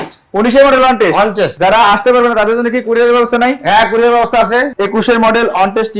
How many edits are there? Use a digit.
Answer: 2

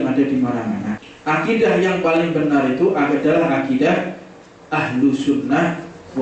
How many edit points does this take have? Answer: 1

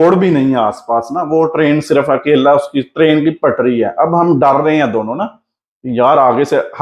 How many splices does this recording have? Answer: 0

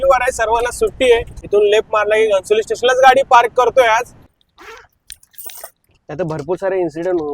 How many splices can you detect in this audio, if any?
2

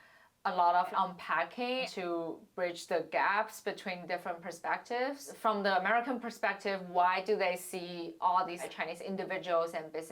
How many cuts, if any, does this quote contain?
2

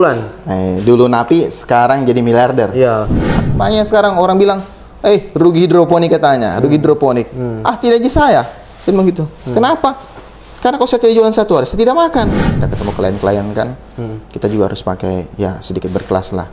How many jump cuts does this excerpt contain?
2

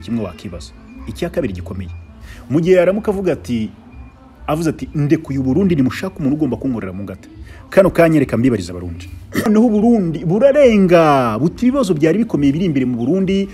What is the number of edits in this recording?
1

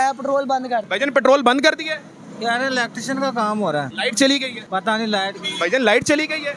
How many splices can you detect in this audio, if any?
3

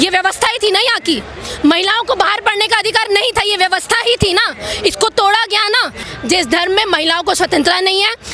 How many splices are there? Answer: 1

